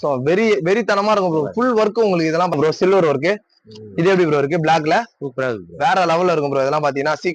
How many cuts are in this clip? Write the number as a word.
one